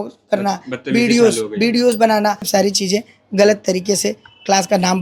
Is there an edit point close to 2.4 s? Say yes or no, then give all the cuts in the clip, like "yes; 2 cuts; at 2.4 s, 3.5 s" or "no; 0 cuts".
yes; 1 cut; at 2.4 s